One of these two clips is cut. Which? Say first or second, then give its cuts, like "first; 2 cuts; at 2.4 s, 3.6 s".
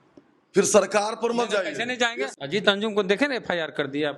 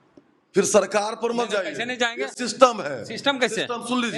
first; 1 cut; at 2.3 s